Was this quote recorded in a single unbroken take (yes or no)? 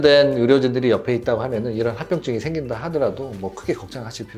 yes